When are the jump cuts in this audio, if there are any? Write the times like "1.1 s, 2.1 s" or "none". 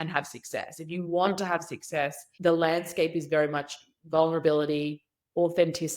2.2 s